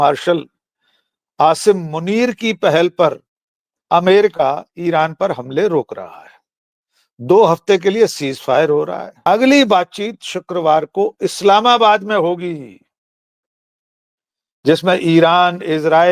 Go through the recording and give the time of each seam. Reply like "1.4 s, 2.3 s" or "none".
9.1 s